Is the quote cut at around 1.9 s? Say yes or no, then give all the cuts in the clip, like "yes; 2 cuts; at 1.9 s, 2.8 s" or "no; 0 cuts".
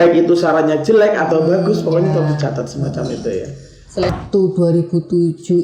no; 1 cut; at 4.1 s